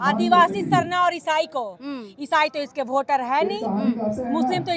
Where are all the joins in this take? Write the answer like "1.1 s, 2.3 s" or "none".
none

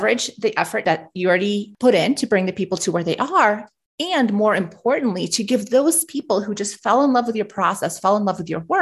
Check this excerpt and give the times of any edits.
1.3 s

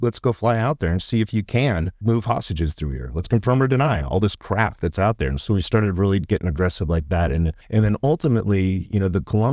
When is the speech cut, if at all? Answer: 2.0 s, 7.6 s

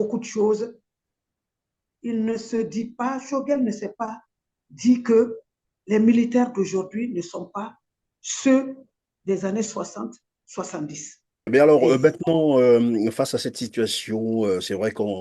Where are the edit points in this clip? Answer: 11.5 s

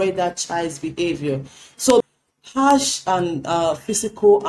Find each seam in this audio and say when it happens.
2.0 s

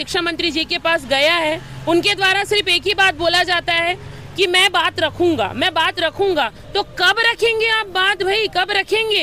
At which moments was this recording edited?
none

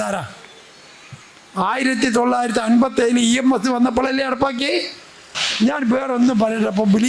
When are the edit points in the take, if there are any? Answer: 5.4 s

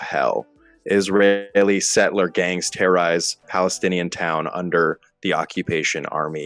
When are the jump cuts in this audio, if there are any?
none

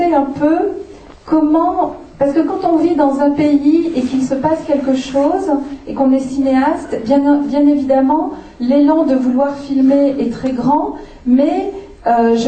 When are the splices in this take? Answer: 3.9 s

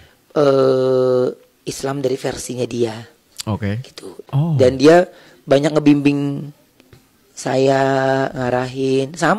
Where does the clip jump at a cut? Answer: 4.1 s

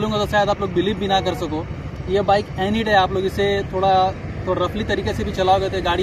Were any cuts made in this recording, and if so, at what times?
none

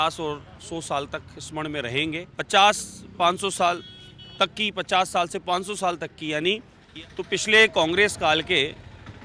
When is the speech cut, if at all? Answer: 2.3 s, 6.8 s

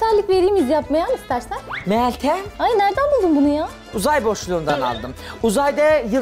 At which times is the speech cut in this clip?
1.7 s

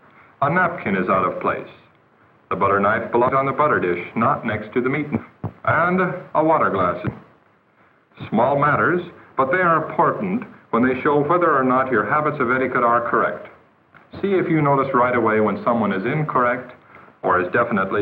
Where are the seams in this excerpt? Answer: 13.4 s

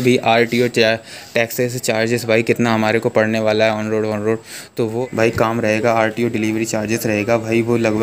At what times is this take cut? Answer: 5.0 s

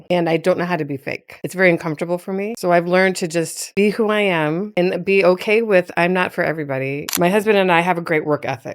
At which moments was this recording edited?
2.6 s, 4.7 s, 7.0 s

